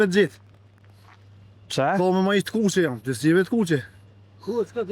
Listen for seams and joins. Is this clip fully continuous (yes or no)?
yes